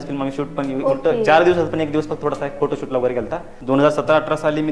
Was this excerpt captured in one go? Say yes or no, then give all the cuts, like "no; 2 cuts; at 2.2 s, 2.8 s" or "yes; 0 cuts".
no; 1 cut; at 3.5 s